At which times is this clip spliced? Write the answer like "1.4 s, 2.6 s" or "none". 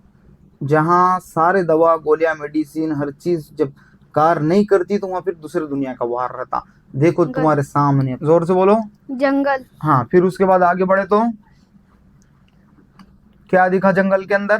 8.1 s